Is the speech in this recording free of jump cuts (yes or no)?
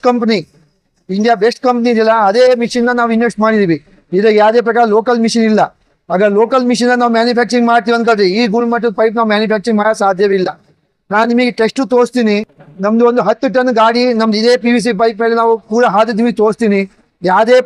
yes